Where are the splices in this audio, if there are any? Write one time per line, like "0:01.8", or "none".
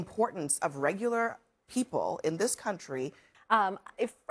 0:03.3